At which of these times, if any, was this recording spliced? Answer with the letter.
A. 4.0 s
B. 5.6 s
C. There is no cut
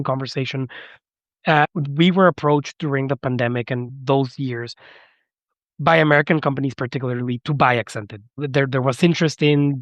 C